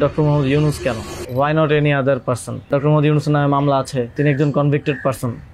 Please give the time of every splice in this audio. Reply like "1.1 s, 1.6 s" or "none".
1.1 s, 2.7 s, 4.1 s